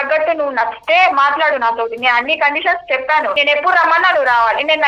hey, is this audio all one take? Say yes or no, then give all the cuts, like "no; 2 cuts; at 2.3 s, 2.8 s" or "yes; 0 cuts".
no; 1 cut; at 3.3 s